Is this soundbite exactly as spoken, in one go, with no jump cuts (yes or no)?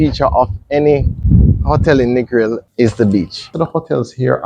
no